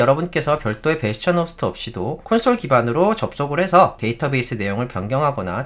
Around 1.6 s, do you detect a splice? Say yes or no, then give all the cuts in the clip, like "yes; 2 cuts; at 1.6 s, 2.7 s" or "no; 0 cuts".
no; 1 cut; at 4.0 s